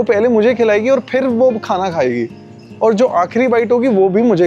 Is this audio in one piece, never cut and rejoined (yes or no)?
yes